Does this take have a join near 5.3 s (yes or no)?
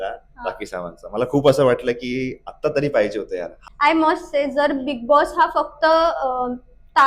no